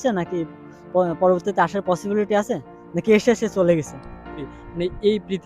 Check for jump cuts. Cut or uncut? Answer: cut